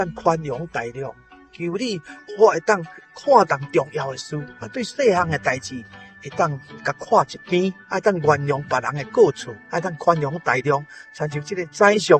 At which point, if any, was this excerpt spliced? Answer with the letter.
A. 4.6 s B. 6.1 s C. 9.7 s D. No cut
D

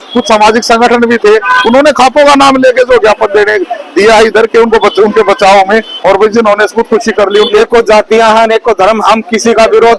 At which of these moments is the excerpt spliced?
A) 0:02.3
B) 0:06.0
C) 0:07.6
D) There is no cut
C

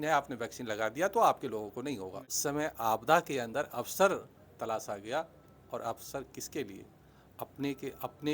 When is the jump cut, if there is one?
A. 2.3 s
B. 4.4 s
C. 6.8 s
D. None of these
A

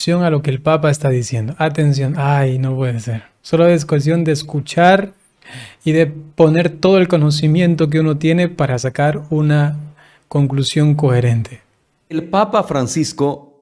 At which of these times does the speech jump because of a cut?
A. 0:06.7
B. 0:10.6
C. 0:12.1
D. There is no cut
C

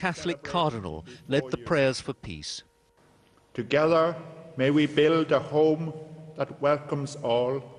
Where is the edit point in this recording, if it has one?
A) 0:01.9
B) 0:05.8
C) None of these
A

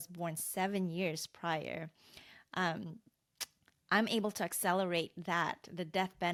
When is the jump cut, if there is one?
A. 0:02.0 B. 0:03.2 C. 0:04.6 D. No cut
D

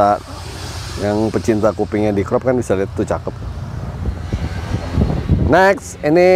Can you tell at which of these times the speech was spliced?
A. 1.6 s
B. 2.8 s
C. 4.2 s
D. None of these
C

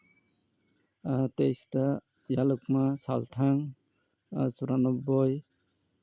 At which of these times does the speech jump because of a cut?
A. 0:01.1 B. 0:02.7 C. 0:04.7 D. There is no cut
D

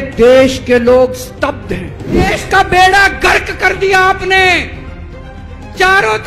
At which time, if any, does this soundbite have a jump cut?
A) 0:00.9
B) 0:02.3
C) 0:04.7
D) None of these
B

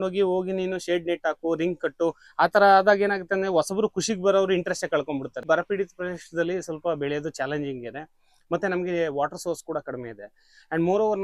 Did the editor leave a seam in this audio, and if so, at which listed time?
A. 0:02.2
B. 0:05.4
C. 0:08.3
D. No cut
B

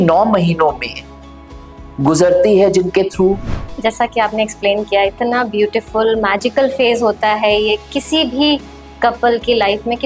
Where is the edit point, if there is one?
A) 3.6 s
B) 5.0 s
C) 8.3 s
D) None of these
A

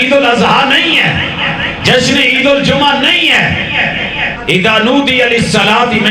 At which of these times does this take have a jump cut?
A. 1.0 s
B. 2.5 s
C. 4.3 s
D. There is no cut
C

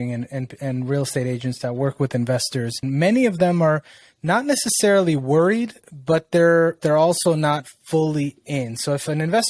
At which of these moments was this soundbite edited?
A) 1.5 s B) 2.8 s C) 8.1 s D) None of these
B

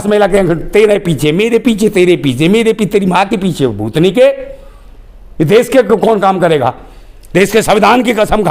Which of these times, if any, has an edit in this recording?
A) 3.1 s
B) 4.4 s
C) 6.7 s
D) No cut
D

